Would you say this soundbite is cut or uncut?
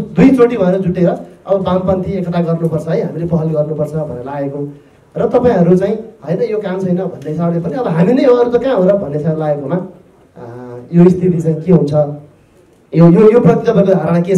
uncut